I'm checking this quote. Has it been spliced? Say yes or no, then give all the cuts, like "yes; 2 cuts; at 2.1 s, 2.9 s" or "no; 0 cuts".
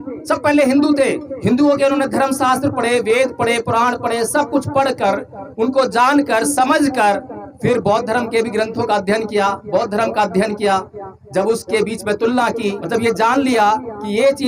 yes; 1 cut; at 12.8 s